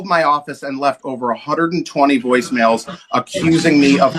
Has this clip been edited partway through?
no; 0 cuts

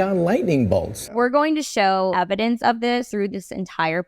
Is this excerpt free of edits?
no; 3 cuts; at 1.0 s, 2.1 s, 3.1 s

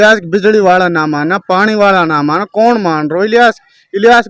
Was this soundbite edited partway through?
no; 0 cuts

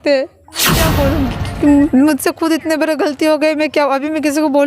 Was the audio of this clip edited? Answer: yes; 1 cut; at 0.9 s

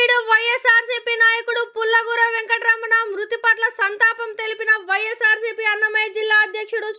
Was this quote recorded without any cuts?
yes; 0 cuts

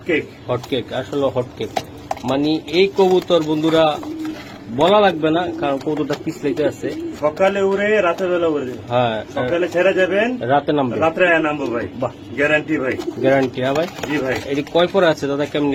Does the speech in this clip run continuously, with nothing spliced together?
yes; 0 cuts

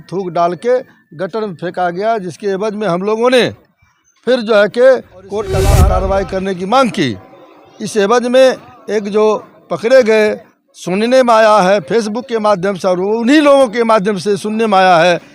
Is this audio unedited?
no; 1 cut; at 5.6 s

